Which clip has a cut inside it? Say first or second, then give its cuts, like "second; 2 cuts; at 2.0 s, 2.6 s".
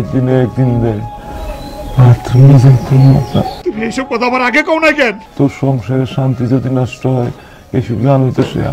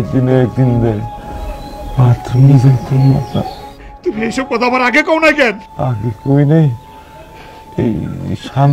first; 2 cuts; at 3.5 s, 5.2 s